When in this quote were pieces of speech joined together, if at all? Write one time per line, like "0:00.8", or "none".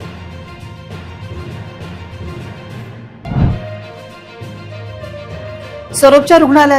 0:02.5